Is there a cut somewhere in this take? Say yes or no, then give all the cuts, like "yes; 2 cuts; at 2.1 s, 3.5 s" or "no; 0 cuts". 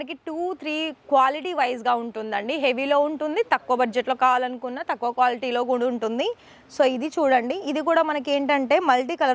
no; 0 cuts